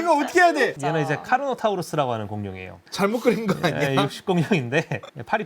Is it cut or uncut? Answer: cut